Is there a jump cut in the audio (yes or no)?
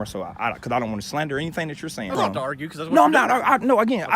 yes